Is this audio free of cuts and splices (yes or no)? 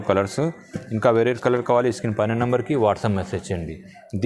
yes